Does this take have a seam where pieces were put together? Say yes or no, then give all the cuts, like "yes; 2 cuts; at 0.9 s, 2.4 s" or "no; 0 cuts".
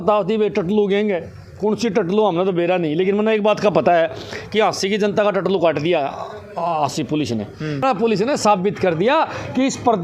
yes; 1 cut; at 7.8 s